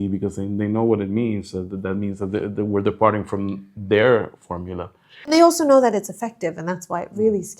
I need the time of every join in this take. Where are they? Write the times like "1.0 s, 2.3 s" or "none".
5.3 s

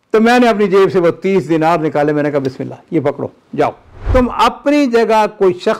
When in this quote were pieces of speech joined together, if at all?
4.1 s

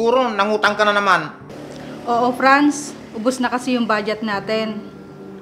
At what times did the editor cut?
none

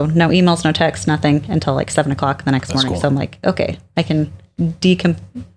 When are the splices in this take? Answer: none

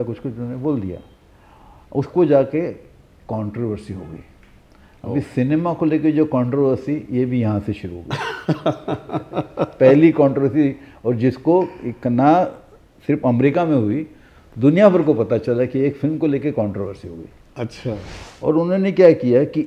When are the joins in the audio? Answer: 18.1 s

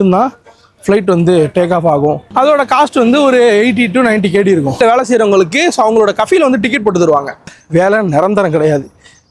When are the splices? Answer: 2.2 s, 4.8 s, 7.6 s

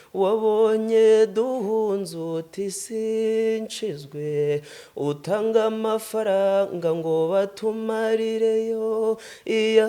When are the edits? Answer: none

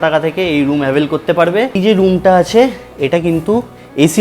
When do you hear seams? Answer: 1.7 s

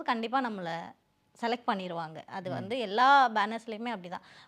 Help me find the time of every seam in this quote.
none

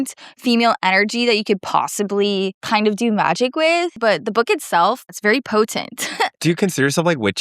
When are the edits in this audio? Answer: 2.6 s, 4.0 s, 5.2 s, 6.4 s

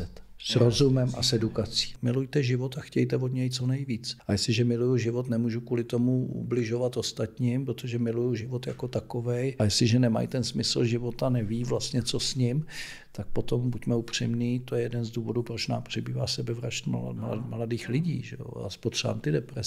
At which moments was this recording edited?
1.9 s, 4.1 s, 9.5 s

